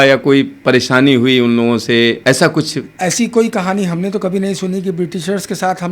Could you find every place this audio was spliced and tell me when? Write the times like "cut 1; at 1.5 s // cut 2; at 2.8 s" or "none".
cut 1; at 2.2 s